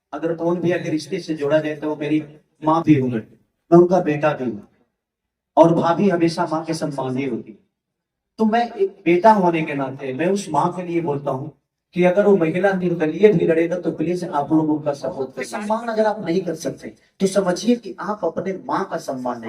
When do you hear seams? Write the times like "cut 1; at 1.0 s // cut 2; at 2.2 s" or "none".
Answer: cut 1; at 15.4 s